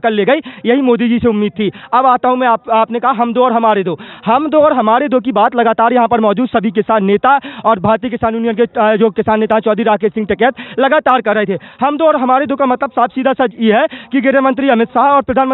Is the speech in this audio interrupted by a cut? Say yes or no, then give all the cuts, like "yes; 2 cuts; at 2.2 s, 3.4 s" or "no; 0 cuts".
no; 0 cuts